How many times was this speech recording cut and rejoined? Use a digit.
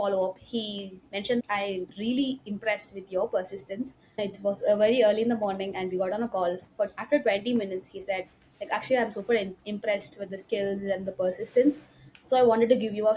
2